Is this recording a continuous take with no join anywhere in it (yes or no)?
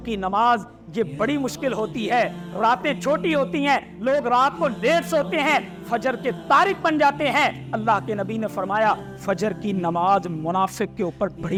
yes